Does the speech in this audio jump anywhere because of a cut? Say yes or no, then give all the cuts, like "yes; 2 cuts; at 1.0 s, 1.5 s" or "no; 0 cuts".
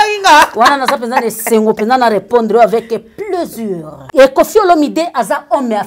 yes; 1 cut; at 3.9 s